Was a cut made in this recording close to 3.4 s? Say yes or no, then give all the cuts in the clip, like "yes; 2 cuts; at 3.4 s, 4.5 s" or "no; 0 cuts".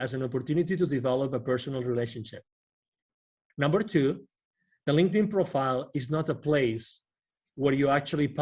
yes; 1 cut; at 3.4 s